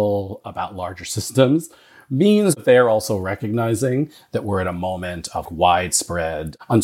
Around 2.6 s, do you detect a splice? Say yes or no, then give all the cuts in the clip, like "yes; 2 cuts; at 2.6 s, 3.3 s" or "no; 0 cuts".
yes; 2 cuts; at 2.6 s, 5.5 s